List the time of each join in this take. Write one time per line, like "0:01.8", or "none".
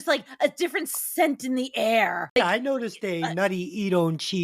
0:02.4